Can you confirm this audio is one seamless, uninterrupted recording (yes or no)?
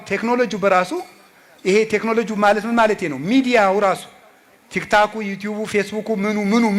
yes